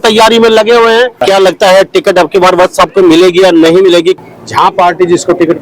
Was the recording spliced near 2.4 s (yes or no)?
no